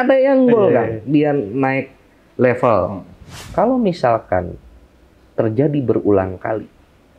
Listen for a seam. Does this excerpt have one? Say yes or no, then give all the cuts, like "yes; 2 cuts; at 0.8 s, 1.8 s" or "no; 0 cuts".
yes; 1 cut; at 3.4 s